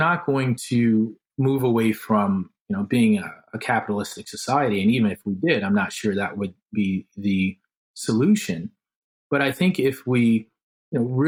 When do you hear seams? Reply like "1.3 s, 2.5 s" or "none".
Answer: none